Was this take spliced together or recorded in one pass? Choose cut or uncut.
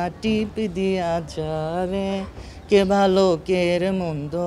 uncut